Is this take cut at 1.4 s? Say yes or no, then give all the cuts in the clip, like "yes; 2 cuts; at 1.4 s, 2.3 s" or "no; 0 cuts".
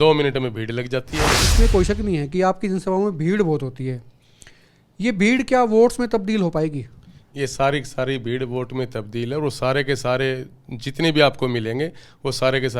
yes; 1 cut; at 1.4 s